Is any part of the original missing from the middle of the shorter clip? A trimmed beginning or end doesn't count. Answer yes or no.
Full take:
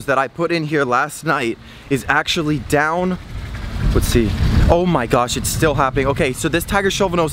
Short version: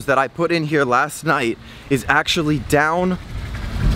no